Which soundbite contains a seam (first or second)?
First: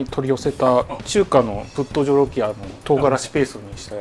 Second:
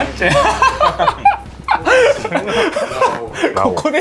first